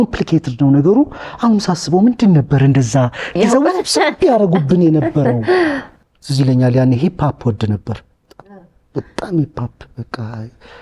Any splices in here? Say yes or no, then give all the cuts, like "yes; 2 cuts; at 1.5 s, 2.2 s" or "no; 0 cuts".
yes; 1 cut; at 5.9 s